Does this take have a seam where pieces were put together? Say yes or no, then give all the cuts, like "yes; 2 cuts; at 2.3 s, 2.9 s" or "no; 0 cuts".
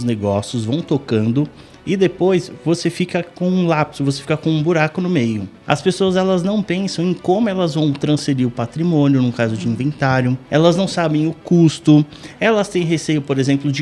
yes; 2 cuts; at 5.5 s, 10.4 s